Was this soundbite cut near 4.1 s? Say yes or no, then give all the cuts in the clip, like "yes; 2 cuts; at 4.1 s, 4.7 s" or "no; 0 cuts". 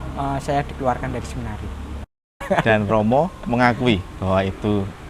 no; 1 cut; at 2.4 s